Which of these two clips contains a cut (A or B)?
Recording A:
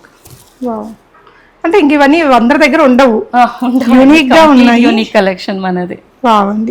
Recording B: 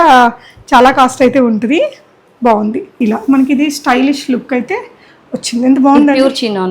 B